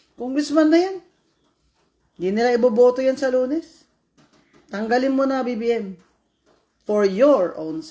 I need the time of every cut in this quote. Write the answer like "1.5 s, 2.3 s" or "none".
none